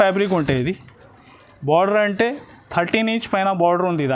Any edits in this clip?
no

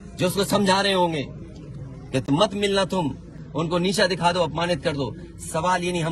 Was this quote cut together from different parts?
no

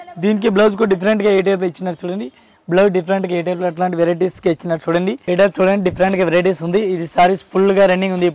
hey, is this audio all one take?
no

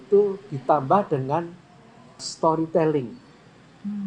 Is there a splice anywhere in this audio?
yes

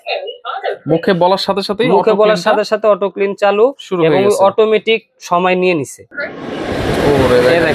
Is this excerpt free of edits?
no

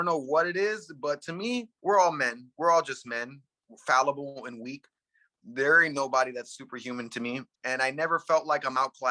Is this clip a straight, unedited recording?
no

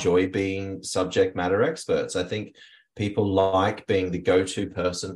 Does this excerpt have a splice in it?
no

